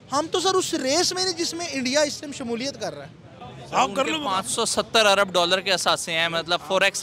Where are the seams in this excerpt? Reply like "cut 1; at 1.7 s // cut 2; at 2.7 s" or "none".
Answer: cut 1; at 3.3 s